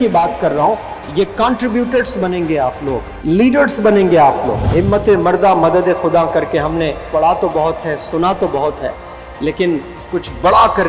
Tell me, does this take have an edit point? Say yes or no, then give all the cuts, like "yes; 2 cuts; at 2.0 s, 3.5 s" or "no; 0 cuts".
yes; 2 cuts; at 3.1 s, 4.6 s